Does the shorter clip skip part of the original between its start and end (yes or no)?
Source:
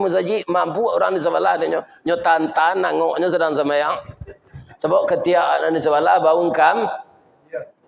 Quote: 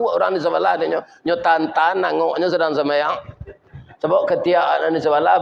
no